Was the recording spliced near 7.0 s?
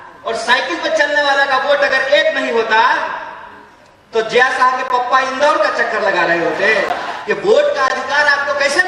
yes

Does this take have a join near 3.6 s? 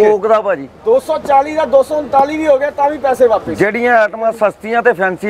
no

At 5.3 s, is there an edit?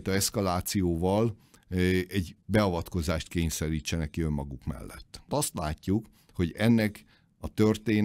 yes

